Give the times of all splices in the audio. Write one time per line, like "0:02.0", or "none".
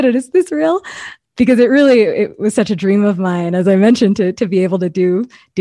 0:01.2